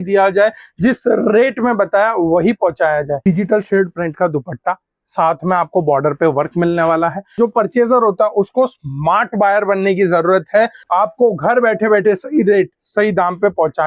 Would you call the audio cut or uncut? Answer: cut